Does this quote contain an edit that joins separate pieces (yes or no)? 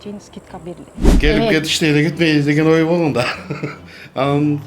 yes